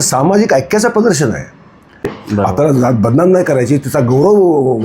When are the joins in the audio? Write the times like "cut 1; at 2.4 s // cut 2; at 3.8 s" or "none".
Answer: cut 1; at 2.1 s